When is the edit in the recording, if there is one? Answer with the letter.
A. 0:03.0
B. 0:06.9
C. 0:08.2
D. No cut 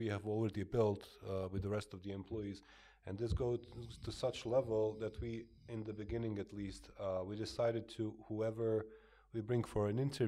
D